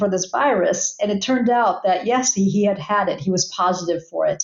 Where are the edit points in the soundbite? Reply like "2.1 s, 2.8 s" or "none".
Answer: none